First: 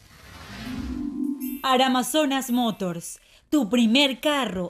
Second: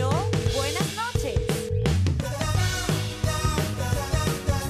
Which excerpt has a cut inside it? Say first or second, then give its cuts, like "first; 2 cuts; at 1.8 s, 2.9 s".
first; 1 cut; at 1.6 s